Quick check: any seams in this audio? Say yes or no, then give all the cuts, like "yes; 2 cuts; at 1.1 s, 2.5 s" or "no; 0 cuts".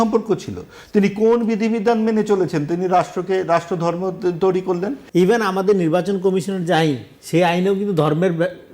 yes; 1 cut; at 5.0 s